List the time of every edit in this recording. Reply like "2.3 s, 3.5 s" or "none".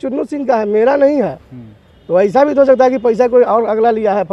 none